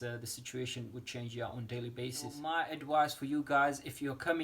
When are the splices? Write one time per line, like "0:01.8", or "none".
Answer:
0:02.4